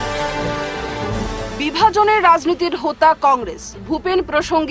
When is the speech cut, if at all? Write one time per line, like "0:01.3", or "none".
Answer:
0:01.1